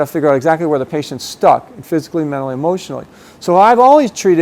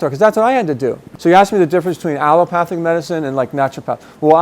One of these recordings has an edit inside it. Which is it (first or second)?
second